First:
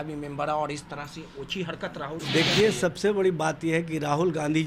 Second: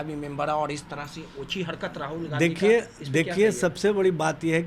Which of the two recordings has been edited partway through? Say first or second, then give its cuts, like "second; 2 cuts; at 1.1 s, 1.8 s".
first; 1 cut; at 2.2 s